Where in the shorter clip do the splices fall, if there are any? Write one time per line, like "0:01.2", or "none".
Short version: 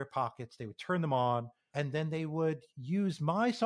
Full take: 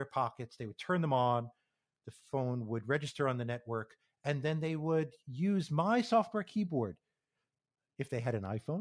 0:01.6